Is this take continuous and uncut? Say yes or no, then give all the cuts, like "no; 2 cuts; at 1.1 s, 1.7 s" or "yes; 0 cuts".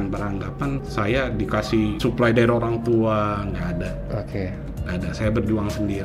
no; 2 cuts; at 0.8 s, 2.0 s